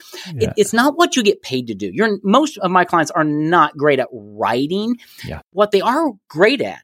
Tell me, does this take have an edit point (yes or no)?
yes